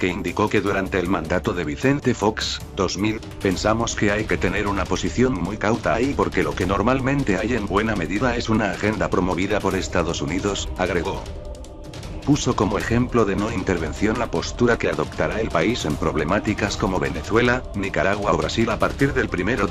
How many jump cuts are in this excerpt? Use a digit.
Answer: 0